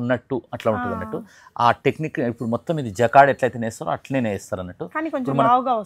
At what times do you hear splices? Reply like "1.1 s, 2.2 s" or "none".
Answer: none

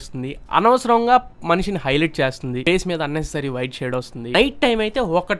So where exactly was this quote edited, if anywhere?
4.3 s

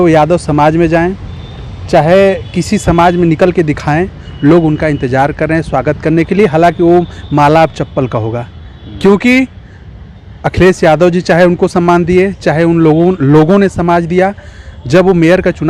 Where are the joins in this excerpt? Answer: none

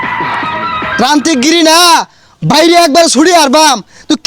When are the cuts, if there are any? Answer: 0.9 s

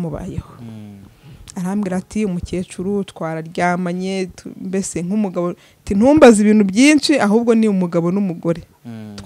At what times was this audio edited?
none

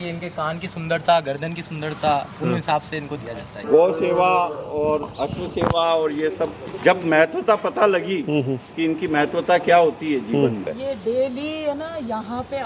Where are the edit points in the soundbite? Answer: 3.5 s, 6.7 s, 10.6 s

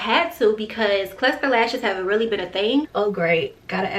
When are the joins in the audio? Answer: 2.9 s

